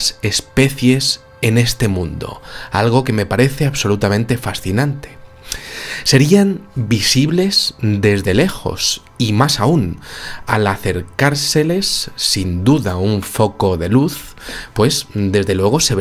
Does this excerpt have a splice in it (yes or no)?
no